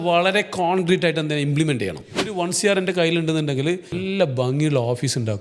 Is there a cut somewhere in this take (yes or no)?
yes